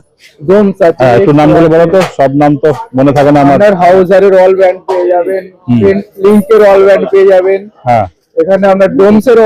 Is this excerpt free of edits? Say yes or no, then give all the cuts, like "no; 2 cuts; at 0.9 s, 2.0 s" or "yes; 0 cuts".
yes; 0 cuts